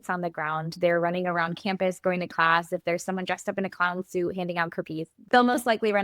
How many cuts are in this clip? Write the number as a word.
one